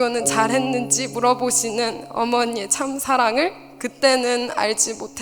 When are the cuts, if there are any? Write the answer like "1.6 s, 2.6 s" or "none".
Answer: none